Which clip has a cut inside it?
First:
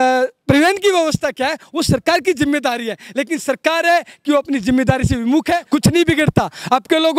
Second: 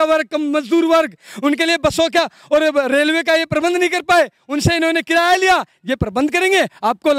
first; 1 cut; at 5.6 s

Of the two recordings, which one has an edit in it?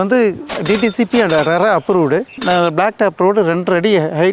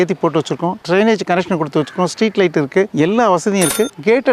first; 1 cut; at 2.4 s

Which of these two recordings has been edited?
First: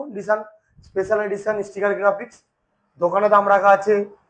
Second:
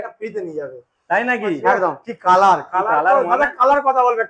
second; 1 cut; at 2.1 s

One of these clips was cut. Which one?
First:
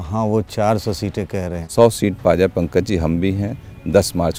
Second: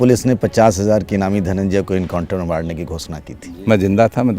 second; 1 cut; at 3.3 s

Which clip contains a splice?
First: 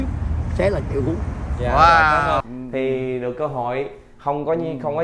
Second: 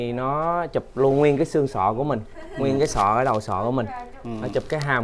first; 1 cut; at 2.4 s

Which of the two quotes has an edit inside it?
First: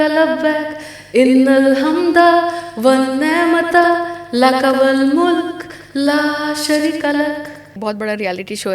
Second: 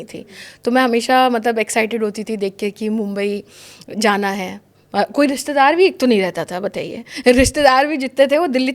first; 1 cut; at 7.8 s

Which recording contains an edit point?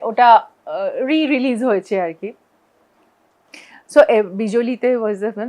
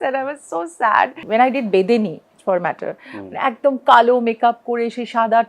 second; 1 cut; at 1.2 s

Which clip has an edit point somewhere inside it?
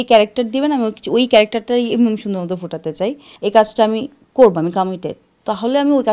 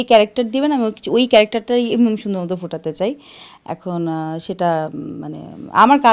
first; 1 cut; at 3.3 s

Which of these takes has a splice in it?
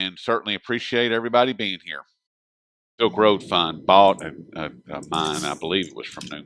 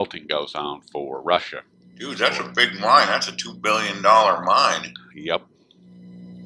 second; 1 cut; at 5.3 s

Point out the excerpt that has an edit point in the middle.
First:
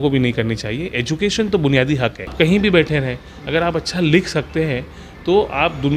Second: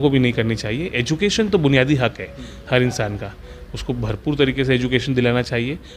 first; 1 cut; at 2.3 s

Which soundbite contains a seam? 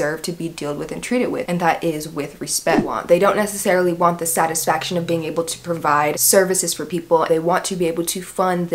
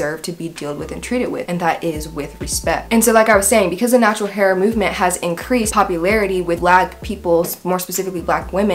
first; 2 cuts; at 2.8 s, 7.3 s

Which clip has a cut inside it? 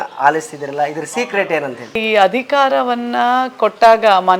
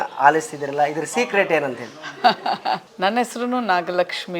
first; 1 cut; at 2.0 s

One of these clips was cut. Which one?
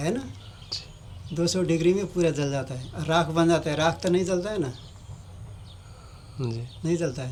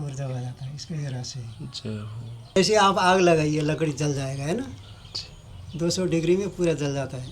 second; 1 cut; at 2.6 s

